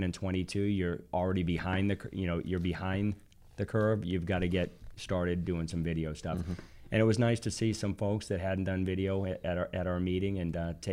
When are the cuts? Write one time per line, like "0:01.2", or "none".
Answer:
none